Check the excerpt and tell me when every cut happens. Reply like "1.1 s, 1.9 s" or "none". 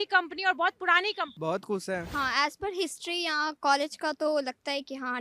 1.3 s, 2.1 s